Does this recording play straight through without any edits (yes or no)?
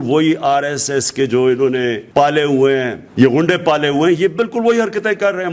no